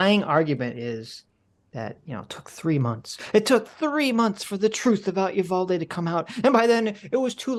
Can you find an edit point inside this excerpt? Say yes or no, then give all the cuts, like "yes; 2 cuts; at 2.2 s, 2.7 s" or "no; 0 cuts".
no; 0 cuts